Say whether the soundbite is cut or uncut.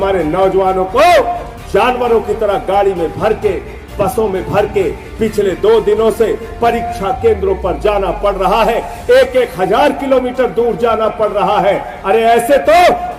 uncut